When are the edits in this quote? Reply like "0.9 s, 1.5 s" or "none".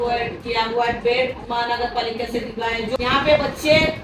3.0 s

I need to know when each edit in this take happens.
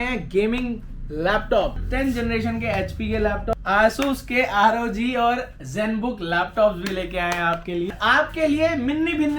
1.8 s, 3.5 s, 7.9 s

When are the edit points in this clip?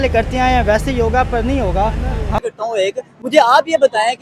2.4 s

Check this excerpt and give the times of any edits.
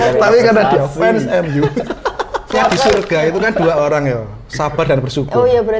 2.5 s

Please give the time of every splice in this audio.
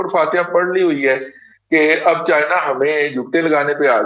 none

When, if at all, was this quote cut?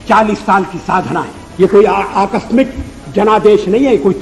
1.4 s

